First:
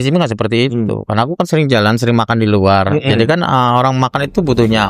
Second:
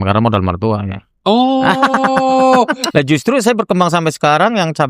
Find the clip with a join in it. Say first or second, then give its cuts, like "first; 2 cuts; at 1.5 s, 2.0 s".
second; 1 cut; at 2.8 s